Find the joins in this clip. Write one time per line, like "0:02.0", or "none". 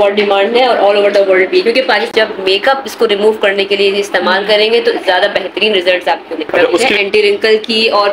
0:02.1
0:06.9